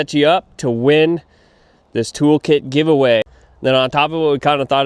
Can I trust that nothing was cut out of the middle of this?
no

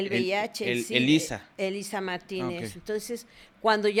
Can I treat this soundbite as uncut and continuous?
yes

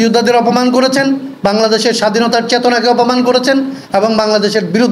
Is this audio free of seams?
yes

